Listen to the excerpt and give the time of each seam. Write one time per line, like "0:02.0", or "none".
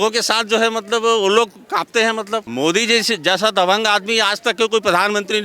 0:02.5